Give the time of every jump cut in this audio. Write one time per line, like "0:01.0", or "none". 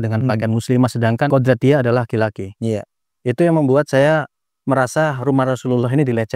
0:01.3